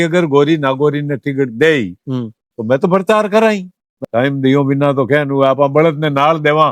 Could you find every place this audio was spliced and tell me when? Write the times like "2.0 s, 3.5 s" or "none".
4.0 s